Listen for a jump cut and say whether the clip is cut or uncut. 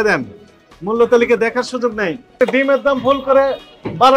cut